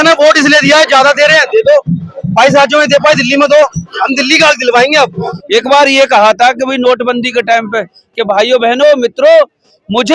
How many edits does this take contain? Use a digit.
1